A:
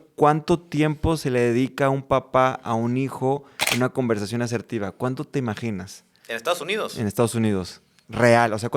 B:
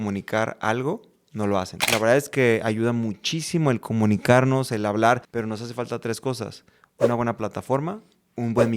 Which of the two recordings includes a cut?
B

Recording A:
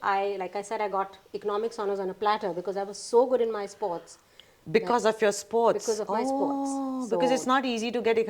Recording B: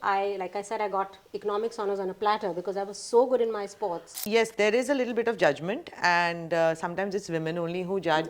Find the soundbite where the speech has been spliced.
B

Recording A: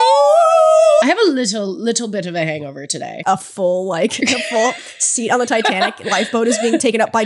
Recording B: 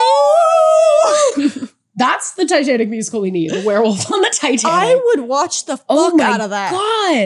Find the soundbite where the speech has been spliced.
A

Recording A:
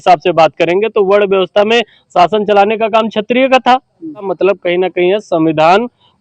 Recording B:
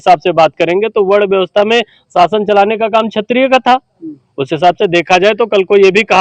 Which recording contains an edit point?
A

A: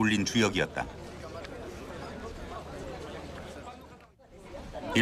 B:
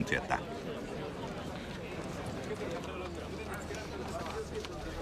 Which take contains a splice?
B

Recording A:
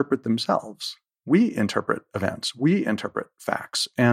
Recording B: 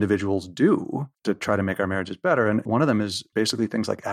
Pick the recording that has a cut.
B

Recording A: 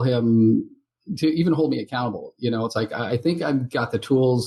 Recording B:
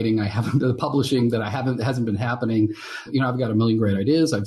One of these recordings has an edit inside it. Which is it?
B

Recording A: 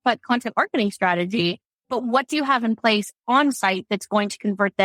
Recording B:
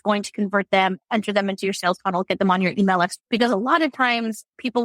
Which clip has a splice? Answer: B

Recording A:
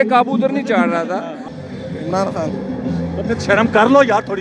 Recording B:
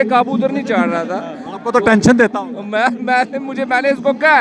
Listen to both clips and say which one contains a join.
A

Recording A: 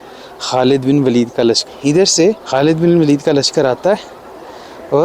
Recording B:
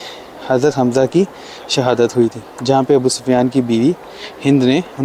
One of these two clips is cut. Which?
A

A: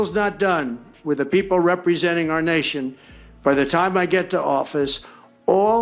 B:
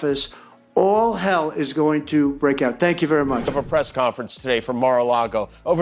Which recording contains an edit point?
B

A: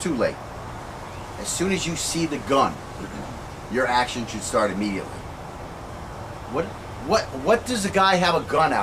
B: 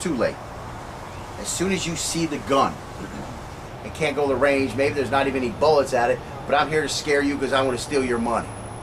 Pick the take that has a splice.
A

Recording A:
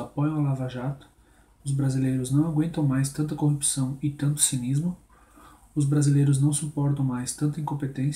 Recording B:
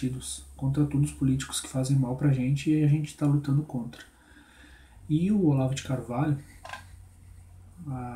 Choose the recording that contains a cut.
A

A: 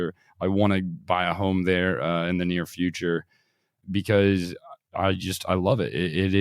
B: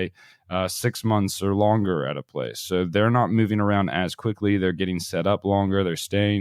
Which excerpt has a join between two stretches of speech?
A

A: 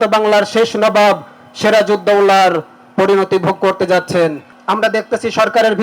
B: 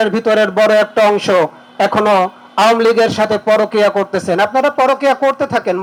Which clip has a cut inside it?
A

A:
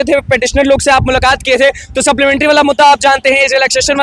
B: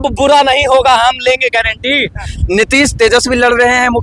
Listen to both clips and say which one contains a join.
B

